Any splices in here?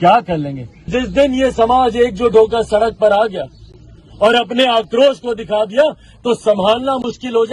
yes; 1 cut; at 0.9 s

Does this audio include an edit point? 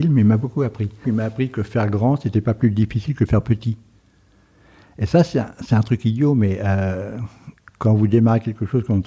yes; 1 cut; at 1.0 s

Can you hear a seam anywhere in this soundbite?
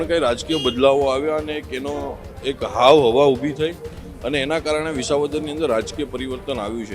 no; 0 cuts

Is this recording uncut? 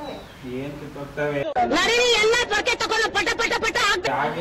yes; 0 cuts

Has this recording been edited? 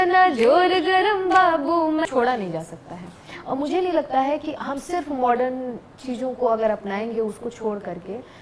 yes; 1 cut; at 2.1 s

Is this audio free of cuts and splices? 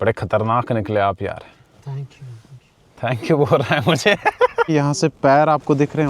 no; 1 cut; at 4.7 s

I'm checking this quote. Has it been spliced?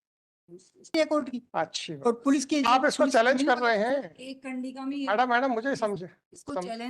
yes; 1 cut; at 0.9 s

